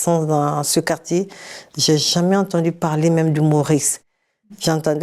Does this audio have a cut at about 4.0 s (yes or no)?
no